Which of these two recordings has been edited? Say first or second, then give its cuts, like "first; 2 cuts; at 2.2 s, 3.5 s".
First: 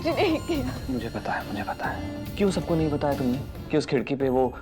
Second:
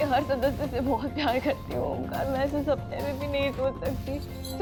first; 1 cut; at 2.3 s